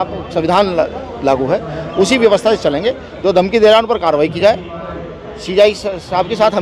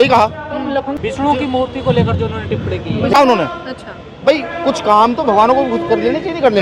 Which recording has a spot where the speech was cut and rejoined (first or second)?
second